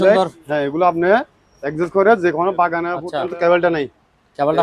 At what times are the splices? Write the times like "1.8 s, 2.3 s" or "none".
3.0 s